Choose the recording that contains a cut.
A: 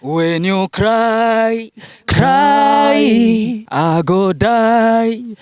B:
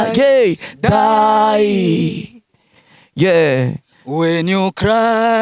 A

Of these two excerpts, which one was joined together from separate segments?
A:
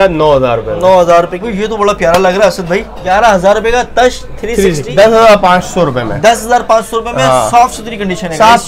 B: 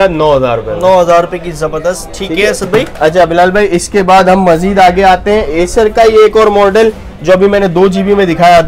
A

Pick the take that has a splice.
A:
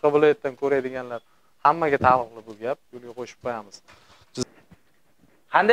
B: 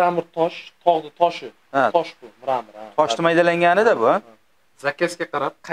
A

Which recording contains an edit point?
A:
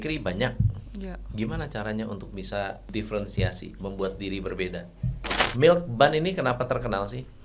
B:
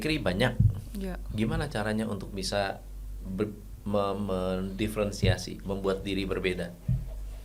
A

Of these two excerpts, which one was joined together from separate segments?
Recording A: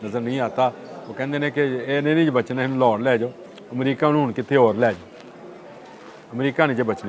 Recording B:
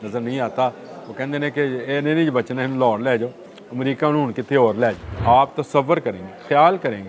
B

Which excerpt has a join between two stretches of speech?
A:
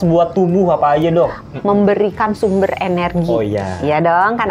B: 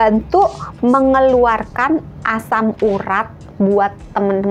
A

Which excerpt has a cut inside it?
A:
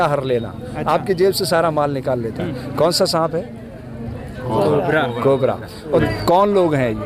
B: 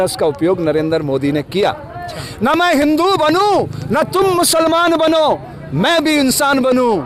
A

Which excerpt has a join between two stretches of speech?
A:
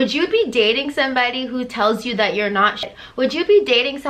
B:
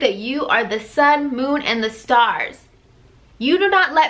A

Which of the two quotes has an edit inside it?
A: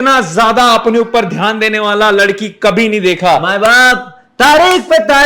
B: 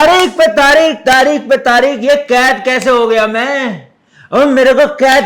A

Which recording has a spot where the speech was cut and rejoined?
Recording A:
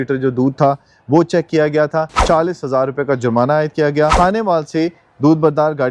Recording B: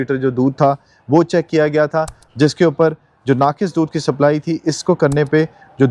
A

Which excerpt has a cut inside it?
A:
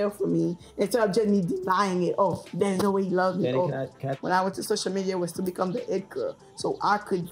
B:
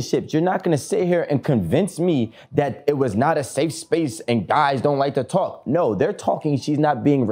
A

